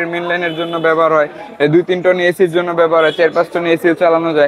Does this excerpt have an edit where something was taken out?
no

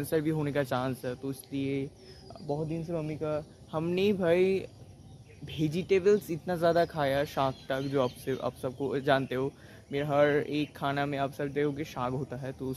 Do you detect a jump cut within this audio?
no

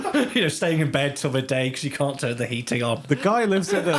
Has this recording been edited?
yes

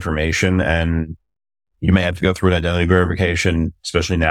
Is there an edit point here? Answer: no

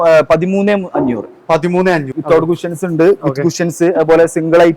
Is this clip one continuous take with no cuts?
no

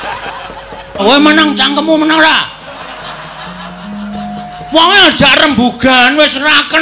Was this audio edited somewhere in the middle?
yes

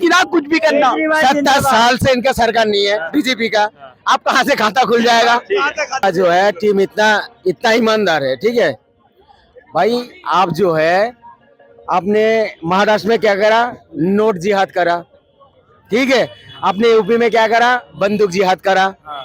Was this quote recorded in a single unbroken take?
no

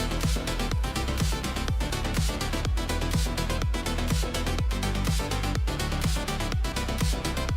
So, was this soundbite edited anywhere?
no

